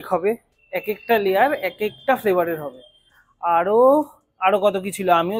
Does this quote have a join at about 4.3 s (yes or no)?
no